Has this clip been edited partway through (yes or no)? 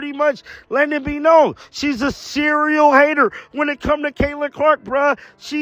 no